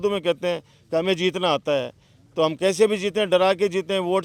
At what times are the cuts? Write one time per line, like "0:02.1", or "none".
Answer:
none